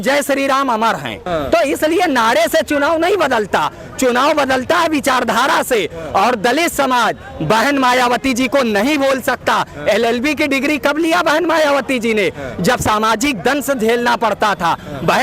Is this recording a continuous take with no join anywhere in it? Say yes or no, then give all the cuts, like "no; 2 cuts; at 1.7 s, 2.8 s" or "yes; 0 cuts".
yes; 0 cuts